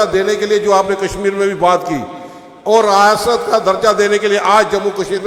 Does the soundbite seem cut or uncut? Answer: uncut